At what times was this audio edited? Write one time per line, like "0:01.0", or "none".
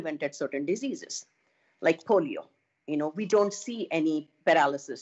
none